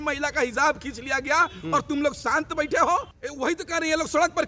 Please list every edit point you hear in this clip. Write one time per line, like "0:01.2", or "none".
0:03.1